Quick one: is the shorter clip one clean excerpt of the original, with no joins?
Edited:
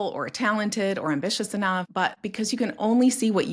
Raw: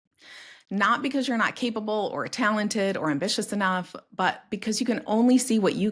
no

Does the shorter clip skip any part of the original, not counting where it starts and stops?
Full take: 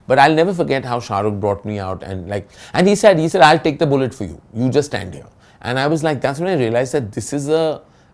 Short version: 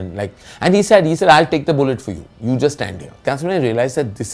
yes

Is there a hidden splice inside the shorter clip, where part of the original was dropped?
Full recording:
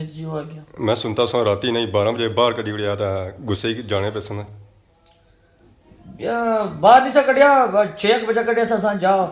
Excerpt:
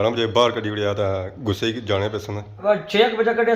yes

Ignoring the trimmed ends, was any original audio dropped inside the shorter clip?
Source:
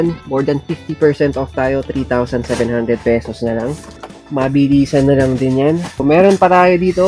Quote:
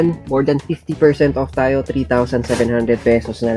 no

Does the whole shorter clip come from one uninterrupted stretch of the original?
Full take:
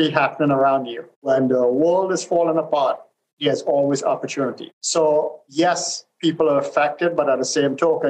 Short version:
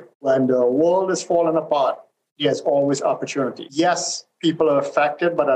no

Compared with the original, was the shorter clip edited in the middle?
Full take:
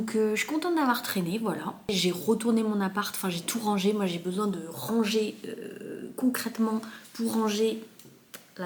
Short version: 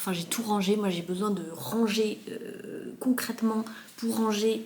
no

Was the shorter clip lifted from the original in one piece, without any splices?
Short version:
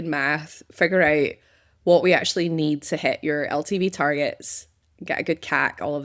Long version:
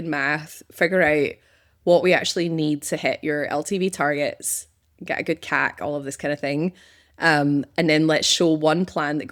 yes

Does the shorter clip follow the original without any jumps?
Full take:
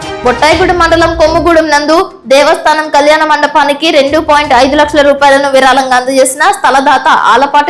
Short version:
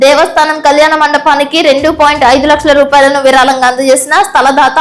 yes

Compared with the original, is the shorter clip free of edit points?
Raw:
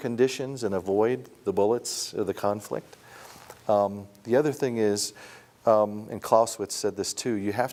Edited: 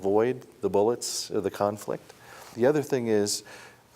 no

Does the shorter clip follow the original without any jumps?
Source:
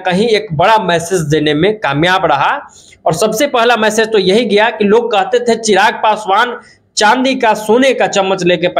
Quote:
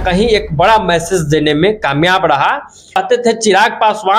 no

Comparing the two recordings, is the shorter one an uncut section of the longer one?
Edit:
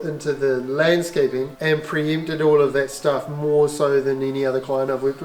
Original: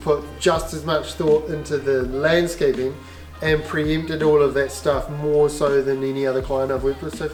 no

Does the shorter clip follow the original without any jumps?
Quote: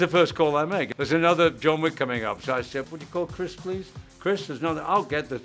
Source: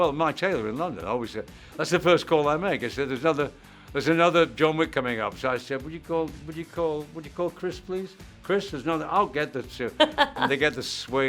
no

